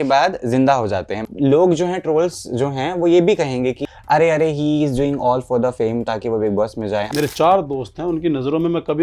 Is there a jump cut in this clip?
yes; 3 cuts; at 1.3 s, 3.9 s, 7.1 s

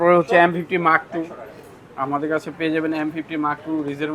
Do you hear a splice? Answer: no; 0 cuts

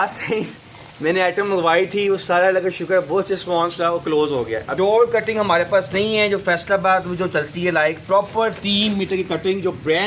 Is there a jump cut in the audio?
yes; 1 cut; at 4.7 s

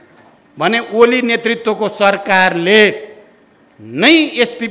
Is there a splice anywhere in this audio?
no; 0 cuts

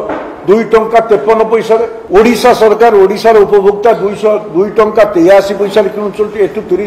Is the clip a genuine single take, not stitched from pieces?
no; 1 cut; at 2.0 s

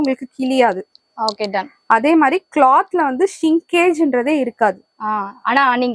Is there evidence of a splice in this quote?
no; 0 cuts

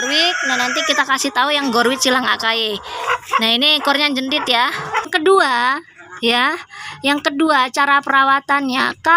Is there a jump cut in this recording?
yes; 1 cut; at 5.1 s

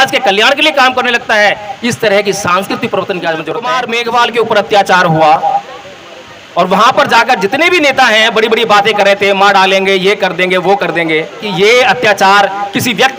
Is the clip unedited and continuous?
no; 2 cuts; at 3.7 s, 11.5 s

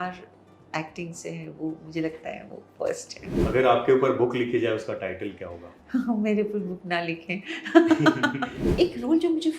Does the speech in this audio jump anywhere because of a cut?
yes; 2 cuts; at 3.2 s, 8.6 s

